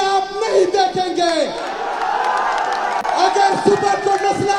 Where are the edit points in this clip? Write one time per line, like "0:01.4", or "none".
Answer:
none